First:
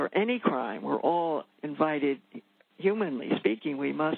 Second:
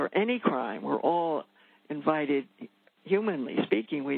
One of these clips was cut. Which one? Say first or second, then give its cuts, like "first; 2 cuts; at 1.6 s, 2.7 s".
first; 1 cut; at 1.6 s